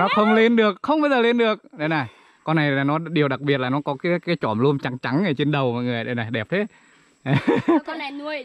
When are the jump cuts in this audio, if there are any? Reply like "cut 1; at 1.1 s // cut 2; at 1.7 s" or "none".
none